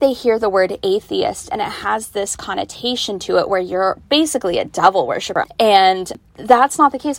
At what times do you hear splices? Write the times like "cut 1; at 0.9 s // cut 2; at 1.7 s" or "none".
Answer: cut 1; at 5.3 s // cut 2; at 6.1 s